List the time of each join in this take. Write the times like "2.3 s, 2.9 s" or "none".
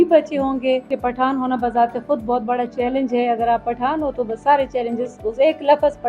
0.9 s